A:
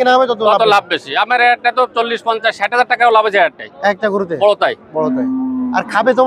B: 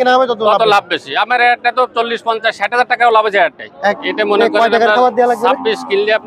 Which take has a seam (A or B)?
B